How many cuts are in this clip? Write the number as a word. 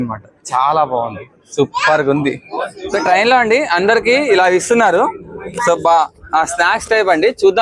one